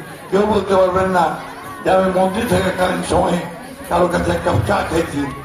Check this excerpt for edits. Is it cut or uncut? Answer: uncut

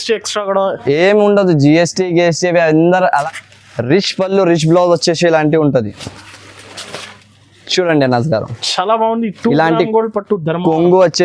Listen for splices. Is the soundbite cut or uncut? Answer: cut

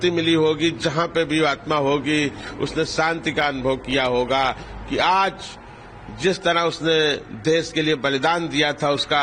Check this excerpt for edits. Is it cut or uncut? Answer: uncut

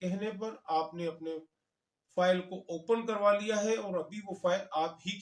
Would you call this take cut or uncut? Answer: uncut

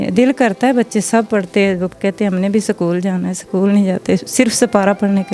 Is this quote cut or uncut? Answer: uncut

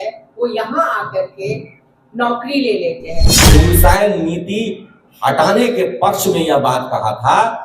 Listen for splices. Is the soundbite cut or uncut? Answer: cut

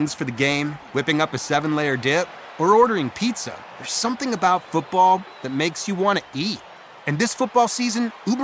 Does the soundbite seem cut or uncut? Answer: uncut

